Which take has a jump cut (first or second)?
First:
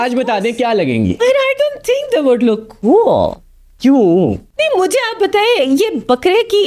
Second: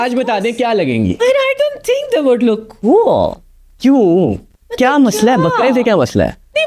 first